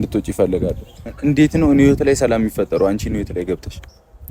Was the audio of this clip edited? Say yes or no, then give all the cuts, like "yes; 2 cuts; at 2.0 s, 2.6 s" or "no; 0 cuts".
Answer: yes; 1 cut; at 1.0 s